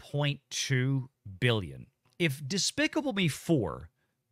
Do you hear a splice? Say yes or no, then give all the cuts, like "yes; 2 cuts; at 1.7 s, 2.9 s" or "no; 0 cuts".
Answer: yes; 1 cut; at 2.1 s